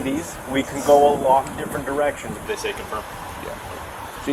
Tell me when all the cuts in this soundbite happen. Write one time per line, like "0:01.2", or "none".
0:02.3